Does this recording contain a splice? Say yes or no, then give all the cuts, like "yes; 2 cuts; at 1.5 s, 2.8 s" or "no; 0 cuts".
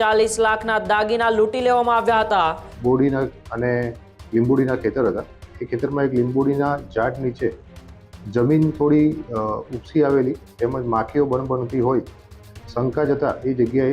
yes; 1 cut; at 2.7 s